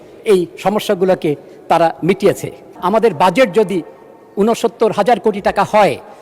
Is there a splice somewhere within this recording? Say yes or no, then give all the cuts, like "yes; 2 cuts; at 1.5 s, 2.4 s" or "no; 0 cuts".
yes; 1 cut; at 2.7 s